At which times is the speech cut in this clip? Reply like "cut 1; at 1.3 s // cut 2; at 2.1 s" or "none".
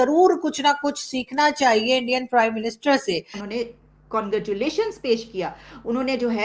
cut 1; at 3.4 s